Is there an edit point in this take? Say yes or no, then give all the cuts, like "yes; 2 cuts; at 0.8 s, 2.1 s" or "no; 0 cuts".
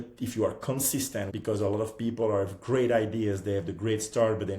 yes; 1 cut; at 1.3 s